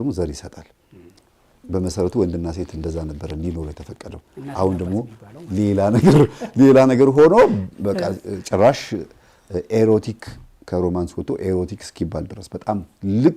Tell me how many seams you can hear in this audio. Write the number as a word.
zero